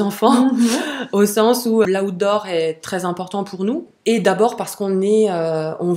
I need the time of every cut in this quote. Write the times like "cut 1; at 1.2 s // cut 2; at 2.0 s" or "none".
cut 1; at 1.9 s // cut 2; at 3.9 s